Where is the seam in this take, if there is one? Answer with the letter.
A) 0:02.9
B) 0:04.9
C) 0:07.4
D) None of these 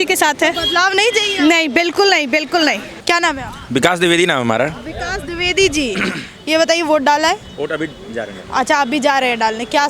A